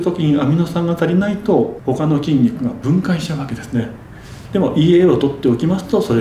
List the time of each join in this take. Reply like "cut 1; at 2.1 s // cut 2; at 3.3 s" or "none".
cut 1; at 1.8 s